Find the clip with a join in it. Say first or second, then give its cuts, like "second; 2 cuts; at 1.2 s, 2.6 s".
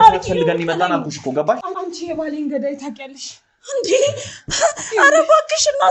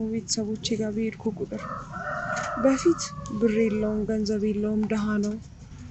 first; 1 cut; at 1.7 s